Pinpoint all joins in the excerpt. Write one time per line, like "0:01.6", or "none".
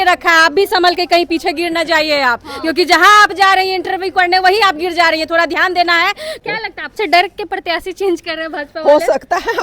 0:06.4